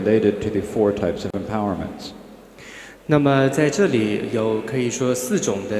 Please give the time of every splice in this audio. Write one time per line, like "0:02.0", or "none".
0:01.5